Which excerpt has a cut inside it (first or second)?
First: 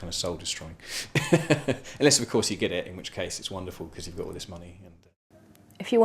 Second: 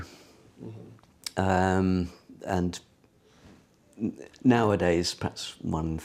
first